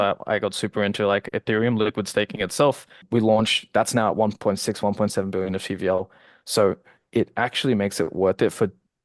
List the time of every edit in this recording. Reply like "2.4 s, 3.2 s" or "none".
2.9 s